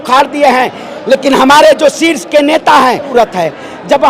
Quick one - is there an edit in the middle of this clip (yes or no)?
yes